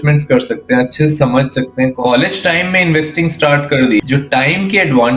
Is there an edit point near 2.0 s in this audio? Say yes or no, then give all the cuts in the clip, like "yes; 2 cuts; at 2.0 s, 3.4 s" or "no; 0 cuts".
yes; 2 cuts; at 2.0 s, 4.0 s